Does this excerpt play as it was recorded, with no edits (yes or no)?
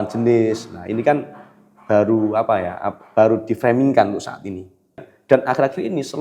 no